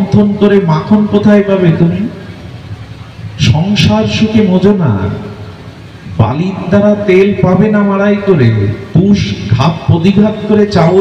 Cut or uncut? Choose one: uncut